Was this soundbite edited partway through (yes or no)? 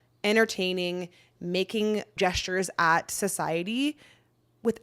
yes